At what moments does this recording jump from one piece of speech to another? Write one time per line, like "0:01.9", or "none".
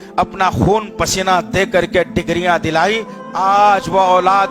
0:03.1